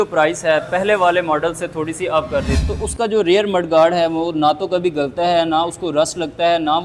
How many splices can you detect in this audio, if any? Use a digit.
1